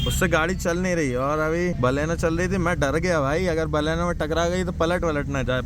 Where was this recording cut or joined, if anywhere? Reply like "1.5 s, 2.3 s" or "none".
1.8 s